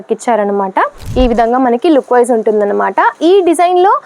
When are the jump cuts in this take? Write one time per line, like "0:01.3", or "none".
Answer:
0:01.1